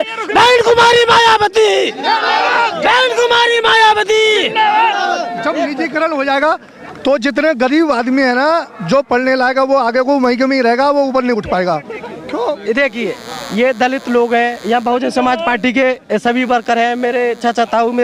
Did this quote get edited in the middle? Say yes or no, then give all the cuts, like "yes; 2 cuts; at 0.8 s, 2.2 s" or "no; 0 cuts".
no; 0 cuts